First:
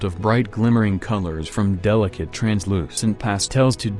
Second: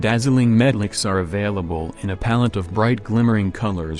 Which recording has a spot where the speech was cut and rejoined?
second; 1 cut; at 1.0 s

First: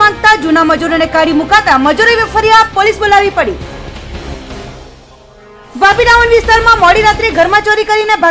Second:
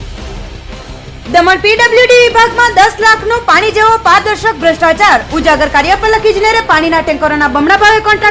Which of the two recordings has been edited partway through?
second; 1 cut; at 1.1 s

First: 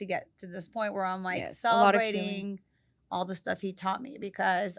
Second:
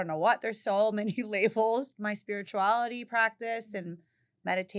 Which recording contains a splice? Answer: second; 1 cut; at 1.9 s

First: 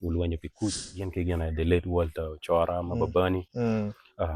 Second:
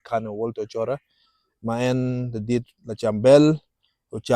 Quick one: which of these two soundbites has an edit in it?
first; 1 cut; at 1.1 s

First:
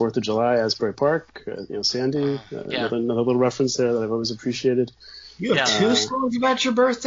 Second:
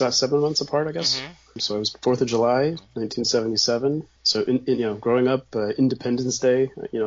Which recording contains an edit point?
second; 2 cuts; at 1.9 s, 4.2 s

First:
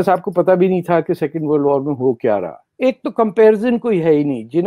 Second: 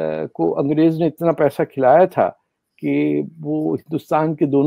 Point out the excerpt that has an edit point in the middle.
first; 1 cut; at 2.6 s

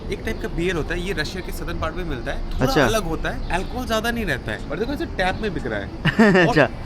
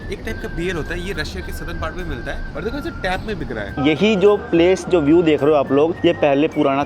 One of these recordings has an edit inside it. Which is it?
second; 3 cuts; at 2.5 s, 3.7 s, 5.9 s

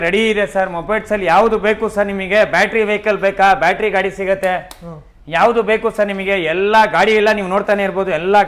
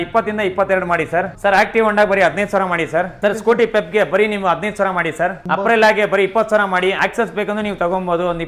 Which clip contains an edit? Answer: second; 4 cuts; at 1.3 s, 3.1 s, 5.4 s, 7.0 s

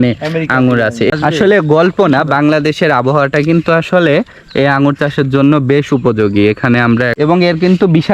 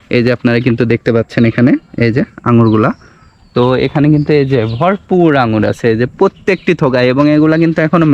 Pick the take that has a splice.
first; 2 cuts; at 1.1 s, 7.2 s

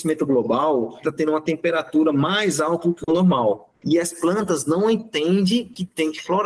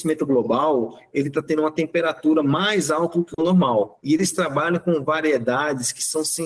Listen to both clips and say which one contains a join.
first; 2 cuts; at 1.0 s, 3.7 s

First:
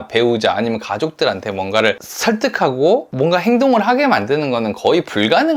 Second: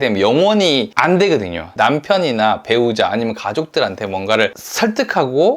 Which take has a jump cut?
second; 1 cut; at 1.6 s

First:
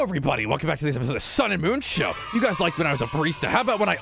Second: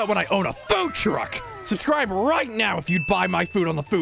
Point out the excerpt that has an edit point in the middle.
second; 1 cut; at 1.4 s

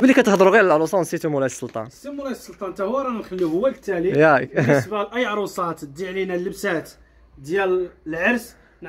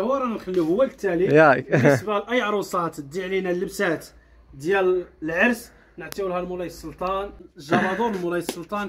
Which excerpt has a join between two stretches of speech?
second; 1 cut; at 7.4 s

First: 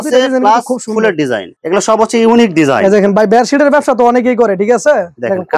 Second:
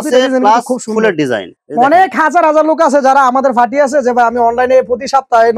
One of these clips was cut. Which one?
second; 1 cut; at 1.5 s

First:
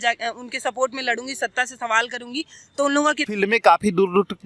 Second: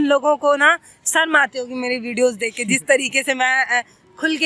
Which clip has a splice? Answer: first; 1 cut; at 3.3 s

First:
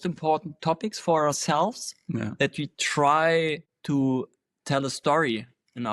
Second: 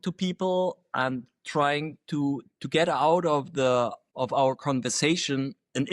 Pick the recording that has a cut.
second; 1 cut; at 4.0 s

